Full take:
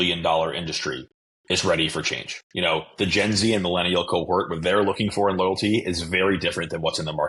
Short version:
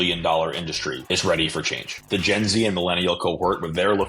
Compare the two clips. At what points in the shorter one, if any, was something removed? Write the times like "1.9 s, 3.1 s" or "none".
1.0 s, 2.0 s